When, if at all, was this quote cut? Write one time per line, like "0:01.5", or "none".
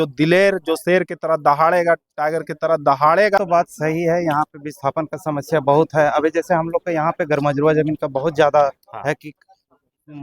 0:03.4